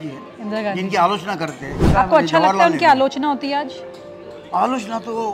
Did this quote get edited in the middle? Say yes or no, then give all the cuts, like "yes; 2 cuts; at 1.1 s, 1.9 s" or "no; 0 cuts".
yes; 1 cut; at 1.8 s